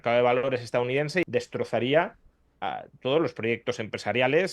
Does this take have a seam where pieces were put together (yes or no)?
yes